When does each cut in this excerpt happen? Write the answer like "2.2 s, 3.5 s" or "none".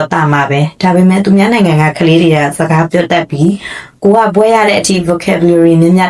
none